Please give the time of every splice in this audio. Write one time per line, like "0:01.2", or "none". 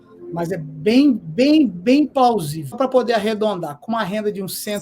0:02.7

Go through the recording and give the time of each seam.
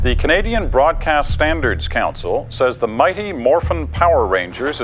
none

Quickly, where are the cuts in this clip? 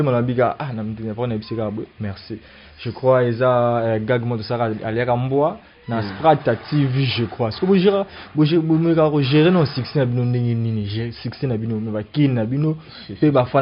none

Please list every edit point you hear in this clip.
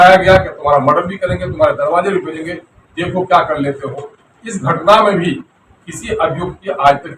none

